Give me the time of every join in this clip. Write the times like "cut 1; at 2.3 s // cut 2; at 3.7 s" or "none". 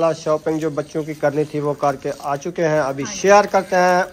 none